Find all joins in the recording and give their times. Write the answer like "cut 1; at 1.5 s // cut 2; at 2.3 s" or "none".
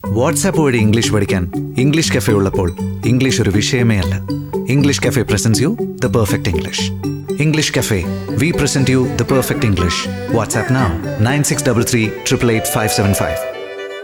none